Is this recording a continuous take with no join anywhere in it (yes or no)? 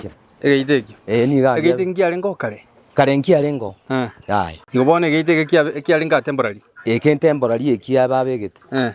no